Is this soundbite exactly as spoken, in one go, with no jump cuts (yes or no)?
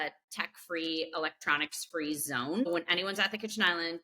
no